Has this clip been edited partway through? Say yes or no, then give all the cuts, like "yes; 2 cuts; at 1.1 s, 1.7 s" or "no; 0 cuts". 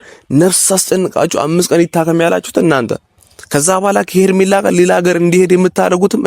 no; 0 cuts